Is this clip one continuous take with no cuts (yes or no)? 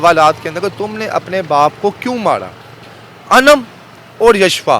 yes